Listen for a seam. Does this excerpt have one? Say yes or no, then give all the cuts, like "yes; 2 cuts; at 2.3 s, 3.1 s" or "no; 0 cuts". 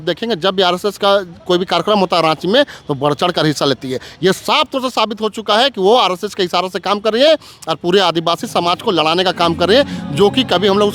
no; 0 cuts